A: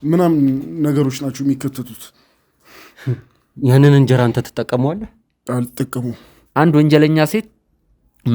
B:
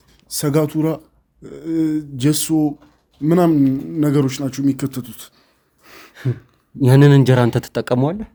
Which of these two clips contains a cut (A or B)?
A